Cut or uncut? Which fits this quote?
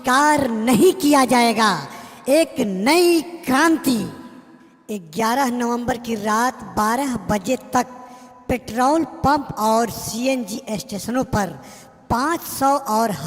cut